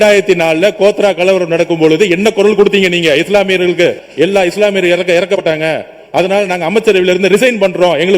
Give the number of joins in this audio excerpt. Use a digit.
1